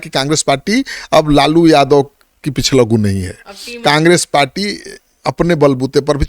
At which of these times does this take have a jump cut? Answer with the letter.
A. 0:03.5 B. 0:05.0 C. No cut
C